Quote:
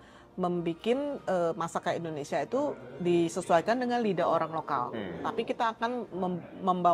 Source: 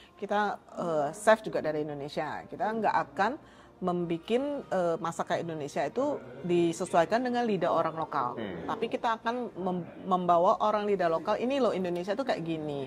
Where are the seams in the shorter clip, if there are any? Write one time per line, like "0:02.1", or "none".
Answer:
none